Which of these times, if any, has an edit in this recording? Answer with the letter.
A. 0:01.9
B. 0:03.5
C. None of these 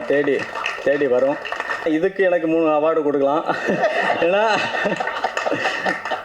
A